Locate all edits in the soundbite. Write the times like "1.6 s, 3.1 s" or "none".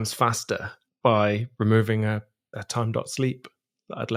none

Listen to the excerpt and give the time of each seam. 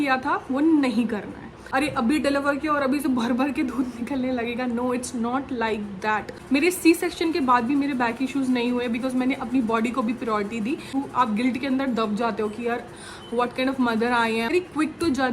1.6 s, 6.4 s, 10.9 s, 14.5 s

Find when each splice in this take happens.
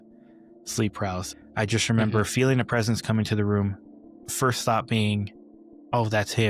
1.4 s

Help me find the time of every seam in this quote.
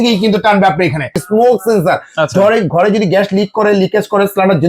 1.2 s

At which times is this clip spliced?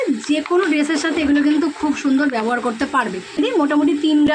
3.3 s

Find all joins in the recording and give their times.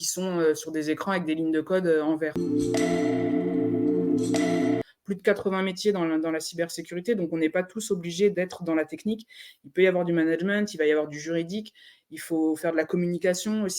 2.4 s, 4.8 s

